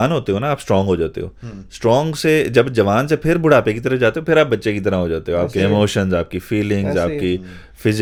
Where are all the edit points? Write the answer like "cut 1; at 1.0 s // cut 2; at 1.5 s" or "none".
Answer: none